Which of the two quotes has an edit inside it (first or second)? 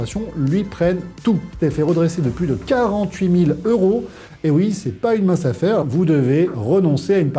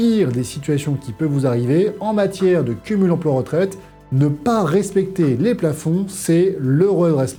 first